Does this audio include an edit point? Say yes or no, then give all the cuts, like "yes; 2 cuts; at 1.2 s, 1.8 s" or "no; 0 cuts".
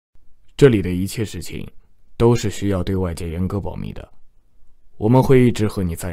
no; 0 cuts